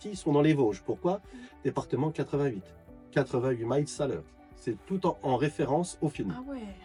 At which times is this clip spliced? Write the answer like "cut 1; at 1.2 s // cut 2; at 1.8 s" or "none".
none